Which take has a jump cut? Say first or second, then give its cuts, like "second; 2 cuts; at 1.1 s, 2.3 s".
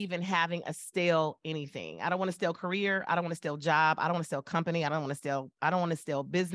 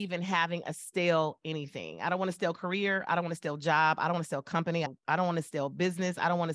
second; 1 cut; at 4.9 s